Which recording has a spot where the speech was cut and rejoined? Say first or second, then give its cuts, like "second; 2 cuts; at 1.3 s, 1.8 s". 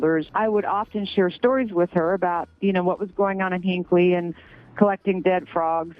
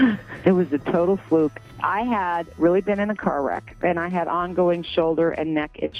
second; 1 cut; at 1.7 s